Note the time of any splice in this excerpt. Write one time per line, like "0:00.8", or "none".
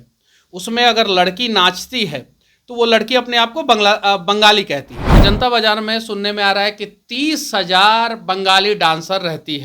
0:05.2